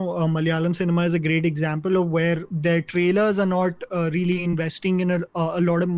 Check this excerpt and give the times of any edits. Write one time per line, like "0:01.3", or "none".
0:02.5